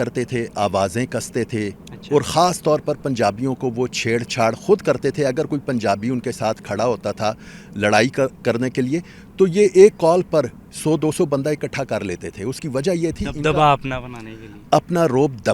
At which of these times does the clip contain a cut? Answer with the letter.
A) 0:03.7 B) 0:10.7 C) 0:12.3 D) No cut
D